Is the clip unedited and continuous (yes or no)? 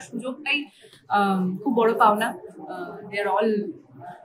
yes